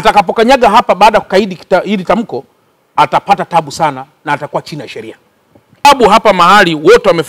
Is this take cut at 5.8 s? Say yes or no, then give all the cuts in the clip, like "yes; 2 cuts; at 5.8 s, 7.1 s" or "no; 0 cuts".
yes; 1 cut; at 5.8 s